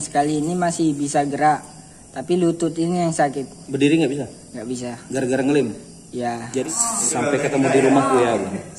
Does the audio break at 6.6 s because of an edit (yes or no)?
yes